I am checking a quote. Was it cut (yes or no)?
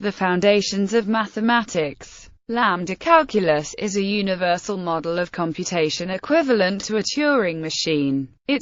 yes